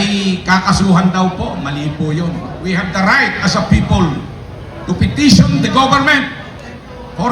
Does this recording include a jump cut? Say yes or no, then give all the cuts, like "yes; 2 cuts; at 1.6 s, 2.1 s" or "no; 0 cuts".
yes; 1 cut; at 2.6 s